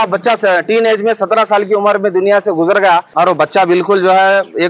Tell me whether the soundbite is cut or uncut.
cut